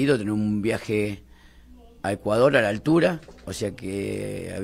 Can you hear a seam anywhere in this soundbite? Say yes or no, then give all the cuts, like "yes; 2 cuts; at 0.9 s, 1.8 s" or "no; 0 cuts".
no; 0 cuts